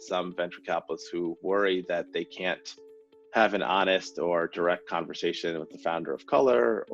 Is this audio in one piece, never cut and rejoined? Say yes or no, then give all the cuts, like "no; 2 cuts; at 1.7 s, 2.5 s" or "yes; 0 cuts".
yes; 0 cuts